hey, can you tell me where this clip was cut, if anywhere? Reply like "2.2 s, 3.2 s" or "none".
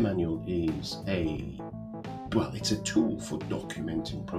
none